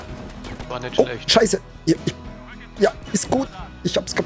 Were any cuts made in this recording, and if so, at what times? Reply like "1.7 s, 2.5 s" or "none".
none